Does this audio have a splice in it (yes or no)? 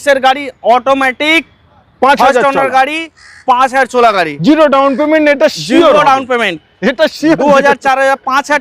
no